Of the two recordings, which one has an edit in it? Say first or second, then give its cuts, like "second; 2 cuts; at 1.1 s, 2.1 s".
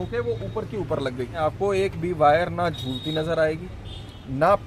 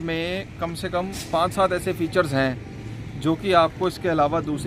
first; 1 cut; at 1.4 s